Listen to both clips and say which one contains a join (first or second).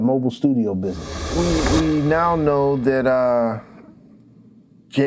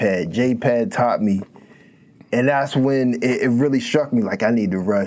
first